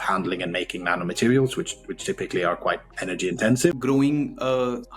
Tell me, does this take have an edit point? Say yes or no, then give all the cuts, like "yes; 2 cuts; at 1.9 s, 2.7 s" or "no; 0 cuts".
yes; 1 cut; at 3.6 s